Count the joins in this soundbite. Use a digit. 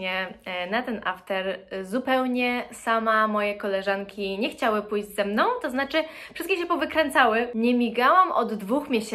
1